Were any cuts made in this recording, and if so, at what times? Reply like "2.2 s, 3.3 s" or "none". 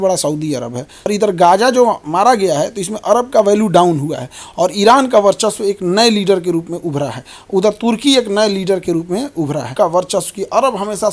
0.9 s, 9.7 s